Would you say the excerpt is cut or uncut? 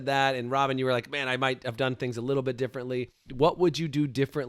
cut